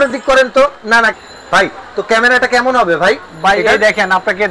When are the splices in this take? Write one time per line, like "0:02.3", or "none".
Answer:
0:01.1